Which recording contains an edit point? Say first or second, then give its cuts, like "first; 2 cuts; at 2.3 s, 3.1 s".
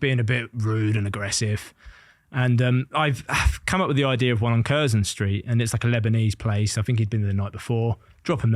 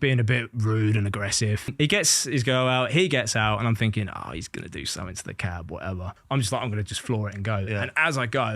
second; 2 cuts; at 1.7 s, 6.2 s